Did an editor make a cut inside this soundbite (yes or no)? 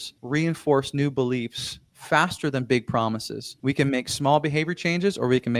no